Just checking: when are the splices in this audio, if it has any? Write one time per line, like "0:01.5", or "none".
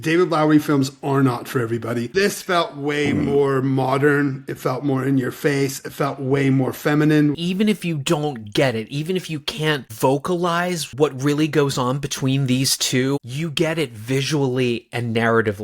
0:02.1
0:07.4
0:10.9